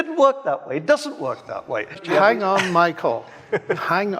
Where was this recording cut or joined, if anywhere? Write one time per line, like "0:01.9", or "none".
0:02.0